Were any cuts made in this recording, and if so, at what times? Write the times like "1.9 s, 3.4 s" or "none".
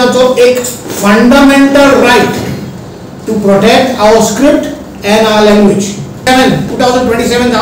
6.2 s